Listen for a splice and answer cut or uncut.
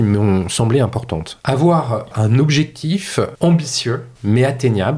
cut